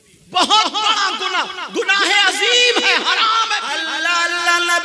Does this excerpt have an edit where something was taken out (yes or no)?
yes